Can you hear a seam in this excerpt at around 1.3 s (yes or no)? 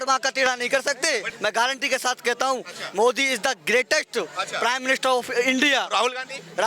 yes